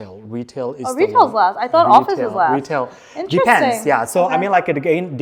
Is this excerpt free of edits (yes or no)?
yes